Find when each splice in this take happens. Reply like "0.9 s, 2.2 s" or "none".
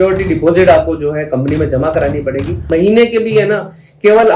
2.7 s